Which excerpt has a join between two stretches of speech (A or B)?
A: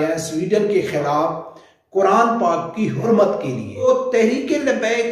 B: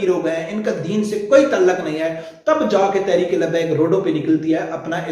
A